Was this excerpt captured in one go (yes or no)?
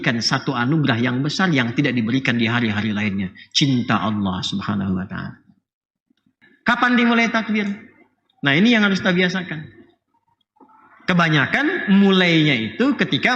no